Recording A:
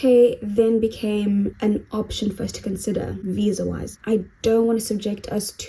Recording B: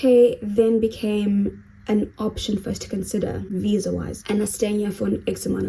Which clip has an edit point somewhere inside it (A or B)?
A